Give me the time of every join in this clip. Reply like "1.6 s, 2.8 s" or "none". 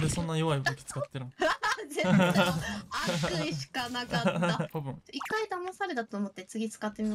4.7 s